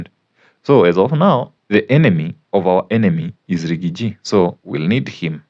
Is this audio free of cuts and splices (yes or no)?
no